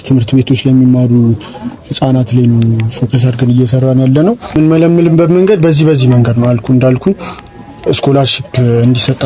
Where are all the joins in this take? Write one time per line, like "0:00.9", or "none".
0:04.6